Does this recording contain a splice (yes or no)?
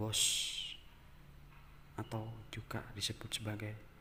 no